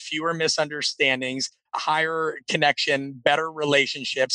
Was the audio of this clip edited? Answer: yes; 1 cut; at 1.7 s

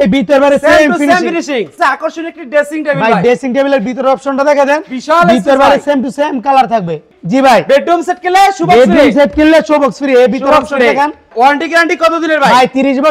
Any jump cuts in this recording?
yes; 3 cuts; at 1.7 s, 7.1 s, 11.3 s

